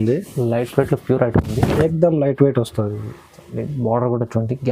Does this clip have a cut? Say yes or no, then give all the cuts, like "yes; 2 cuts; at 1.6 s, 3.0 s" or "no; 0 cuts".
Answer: no; 0 cuts